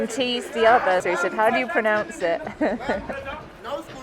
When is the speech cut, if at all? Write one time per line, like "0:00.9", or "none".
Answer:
0:01.0